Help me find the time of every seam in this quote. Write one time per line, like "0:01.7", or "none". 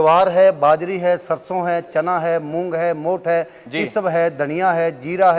none